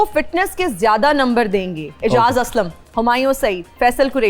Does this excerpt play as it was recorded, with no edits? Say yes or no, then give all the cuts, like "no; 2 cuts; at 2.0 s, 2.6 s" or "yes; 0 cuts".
no; 2 cuts; at 1.8 s, 2.8 s